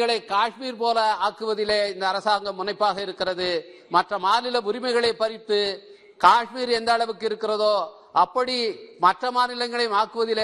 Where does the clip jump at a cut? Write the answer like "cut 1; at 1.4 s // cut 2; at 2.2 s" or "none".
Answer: none